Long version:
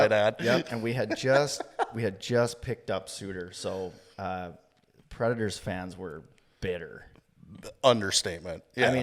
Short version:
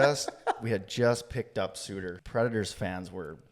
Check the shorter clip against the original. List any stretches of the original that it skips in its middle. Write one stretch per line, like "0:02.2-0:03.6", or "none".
0:03.5-0:05.0